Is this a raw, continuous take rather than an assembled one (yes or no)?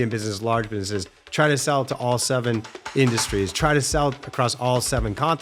yes